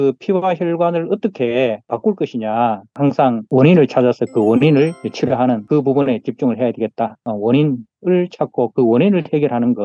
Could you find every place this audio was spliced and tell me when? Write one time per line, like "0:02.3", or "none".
0:02.9
0:07.2